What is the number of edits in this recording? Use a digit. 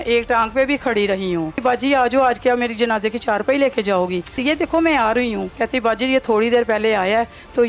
3